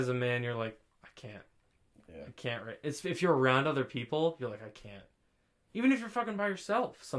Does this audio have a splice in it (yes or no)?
no